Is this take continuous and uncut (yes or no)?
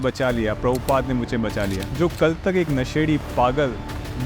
no